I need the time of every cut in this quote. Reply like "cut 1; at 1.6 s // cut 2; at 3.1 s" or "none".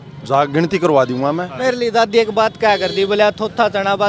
cut 1; at 1.6 s